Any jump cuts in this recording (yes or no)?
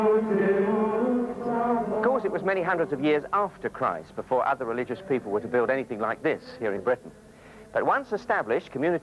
yes